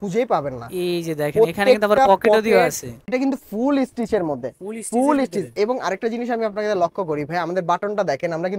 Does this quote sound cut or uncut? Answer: cut